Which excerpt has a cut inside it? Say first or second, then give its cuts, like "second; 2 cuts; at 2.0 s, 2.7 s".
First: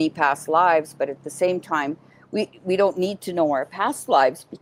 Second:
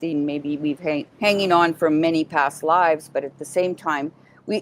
second; 1 cut; at 1.1 s